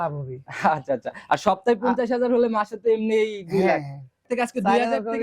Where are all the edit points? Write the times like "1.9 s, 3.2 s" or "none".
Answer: 4.3 s

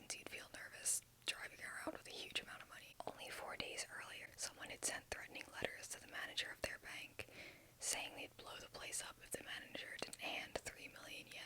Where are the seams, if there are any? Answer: 2.8 s, 4.3 s

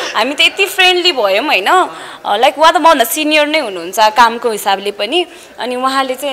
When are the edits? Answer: none

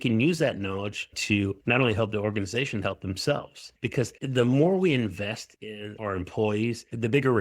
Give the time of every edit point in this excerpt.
3.6 s

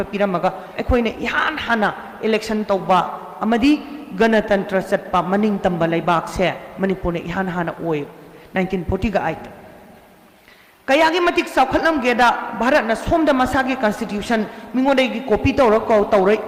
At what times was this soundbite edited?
none

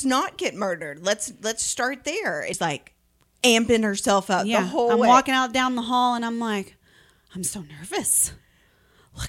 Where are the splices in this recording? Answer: 2.6 s

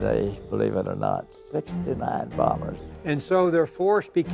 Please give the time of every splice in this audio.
2.9 s

